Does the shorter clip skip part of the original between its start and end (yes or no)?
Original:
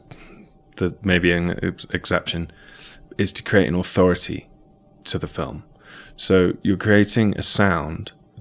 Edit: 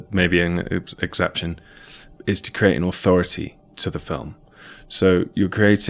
yes